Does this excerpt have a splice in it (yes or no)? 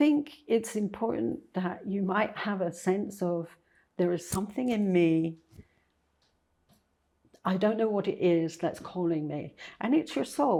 no